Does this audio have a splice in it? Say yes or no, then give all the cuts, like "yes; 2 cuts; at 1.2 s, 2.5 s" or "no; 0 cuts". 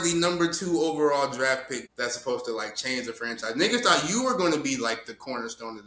yes; 1 cut; at 1.8 s